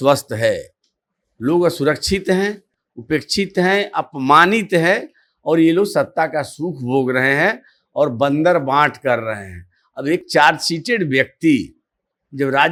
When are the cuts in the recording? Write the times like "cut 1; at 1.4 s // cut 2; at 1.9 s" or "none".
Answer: none